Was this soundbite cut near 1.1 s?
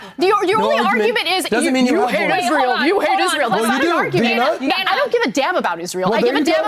no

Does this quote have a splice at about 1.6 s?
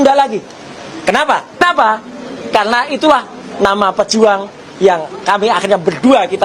yes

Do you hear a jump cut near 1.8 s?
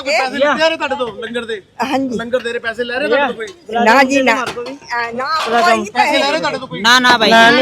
no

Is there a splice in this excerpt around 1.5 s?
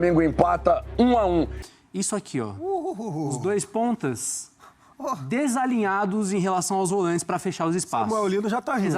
yes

